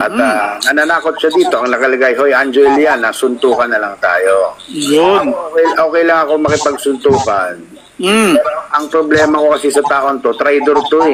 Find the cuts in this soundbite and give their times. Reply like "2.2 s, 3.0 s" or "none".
none

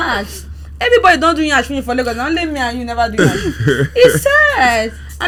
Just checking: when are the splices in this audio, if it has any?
none

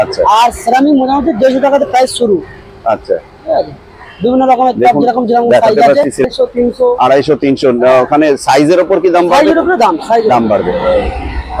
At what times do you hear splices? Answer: 6.2 s

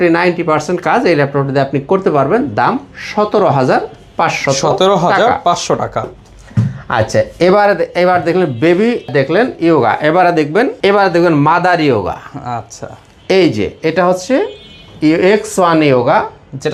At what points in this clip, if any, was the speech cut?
none

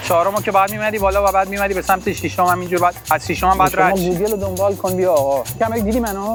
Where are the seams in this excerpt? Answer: none

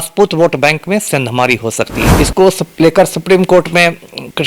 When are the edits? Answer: 2.0 s

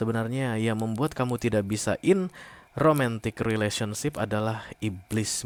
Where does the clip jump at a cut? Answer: none

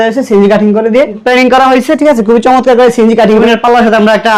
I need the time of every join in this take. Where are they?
1.2 s, 3.4 s

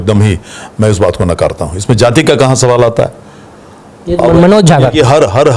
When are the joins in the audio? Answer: none

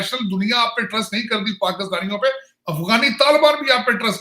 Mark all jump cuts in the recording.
none

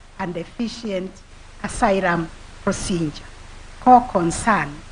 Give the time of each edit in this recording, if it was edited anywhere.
3.8 s

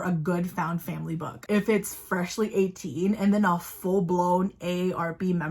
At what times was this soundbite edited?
1.4 s

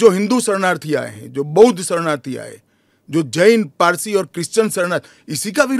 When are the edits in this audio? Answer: none

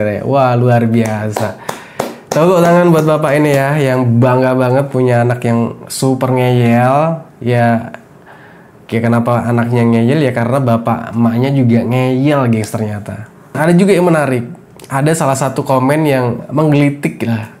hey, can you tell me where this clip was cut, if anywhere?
13.5 s

